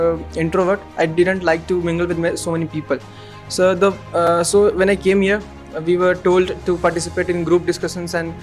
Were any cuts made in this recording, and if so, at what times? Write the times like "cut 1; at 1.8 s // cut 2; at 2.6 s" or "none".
none